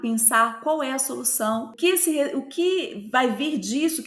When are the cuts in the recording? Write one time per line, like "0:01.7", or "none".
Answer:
none